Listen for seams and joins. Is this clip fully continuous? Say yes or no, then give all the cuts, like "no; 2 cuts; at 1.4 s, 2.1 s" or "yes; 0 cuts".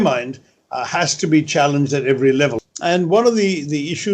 no; 1 cut; at 2.6 s